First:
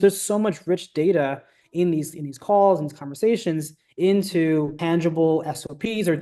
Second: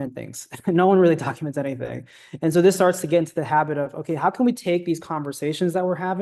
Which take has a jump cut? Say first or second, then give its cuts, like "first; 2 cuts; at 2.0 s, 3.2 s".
first; 1 cut; at 4.8 s